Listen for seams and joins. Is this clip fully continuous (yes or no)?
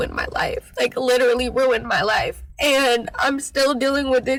yes